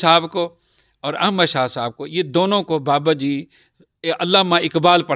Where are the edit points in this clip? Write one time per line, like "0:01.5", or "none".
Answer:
none